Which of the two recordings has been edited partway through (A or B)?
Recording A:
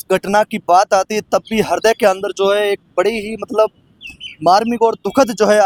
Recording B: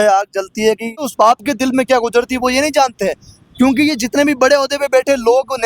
B